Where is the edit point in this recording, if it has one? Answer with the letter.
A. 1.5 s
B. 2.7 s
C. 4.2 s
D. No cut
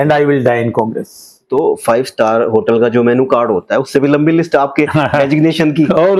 A